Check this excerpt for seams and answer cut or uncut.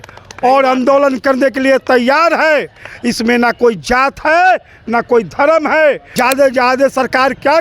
cut